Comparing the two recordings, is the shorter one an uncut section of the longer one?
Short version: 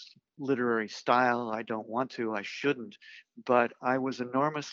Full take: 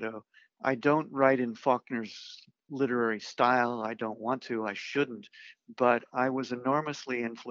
yes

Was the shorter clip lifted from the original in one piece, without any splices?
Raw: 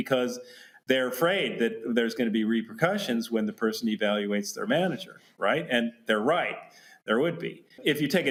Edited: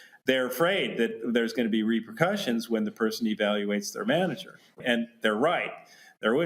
no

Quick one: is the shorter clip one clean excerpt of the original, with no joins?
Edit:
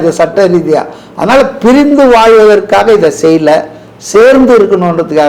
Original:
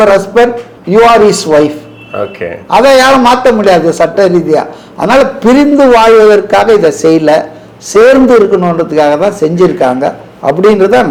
yes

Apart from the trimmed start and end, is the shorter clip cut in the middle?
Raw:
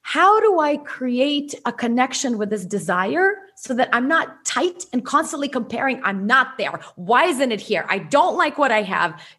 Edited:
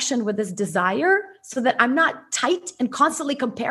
no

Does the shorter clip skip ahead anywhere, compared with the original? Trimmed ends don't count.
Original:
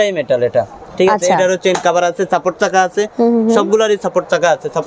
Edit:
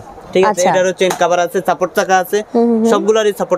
no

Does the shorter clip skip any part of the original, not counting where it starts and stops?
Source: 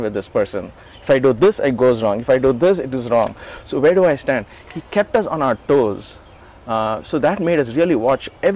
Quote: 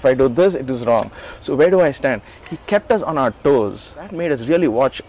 yes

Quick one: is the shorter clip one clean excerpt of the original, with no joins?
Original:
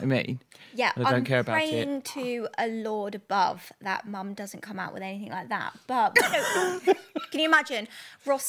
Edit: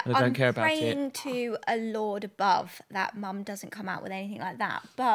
yes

